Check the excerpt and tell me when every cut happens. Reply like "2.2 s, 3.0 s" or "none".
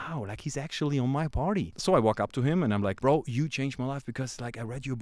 1.7 s, 3.0 s